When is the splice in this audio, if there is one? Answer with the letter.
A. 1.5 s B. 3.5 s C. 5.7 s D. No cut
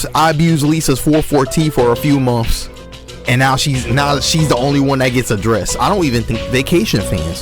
C